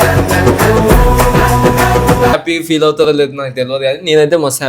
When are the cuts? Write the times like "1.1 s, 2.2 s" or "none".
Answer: 2.3 s